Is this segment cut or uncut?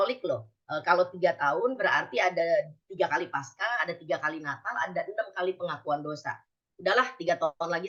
uncut